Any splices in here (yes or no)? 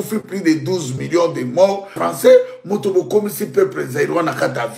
yes